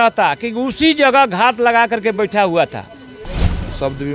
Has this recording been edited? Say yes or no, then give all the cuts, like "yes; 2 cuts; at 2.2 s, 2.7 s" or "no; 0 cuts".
yes; 1 cut; at 3.2 s